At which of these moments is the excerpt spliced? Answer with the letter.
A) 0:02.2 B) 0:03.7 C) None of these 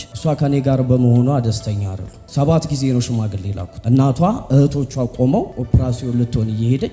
B